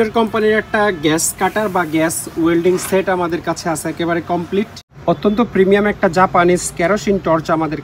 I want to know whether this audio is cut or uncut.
cut